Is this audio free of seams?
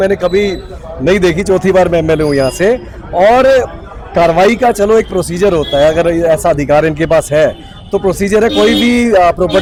yes; 0 cuts

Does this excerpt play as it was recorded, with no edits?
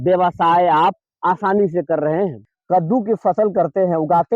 no; 1 cut; at 2.5 s

